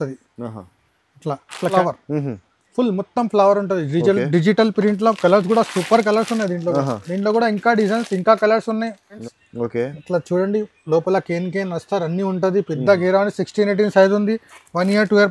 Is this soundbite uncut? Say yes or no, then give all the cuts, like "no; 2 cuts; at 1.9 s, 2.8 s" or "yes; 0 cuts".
no; 2 cuts; at 1.7 s, 9.2 s